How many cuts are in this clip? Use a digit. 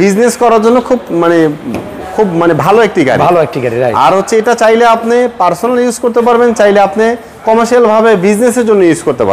0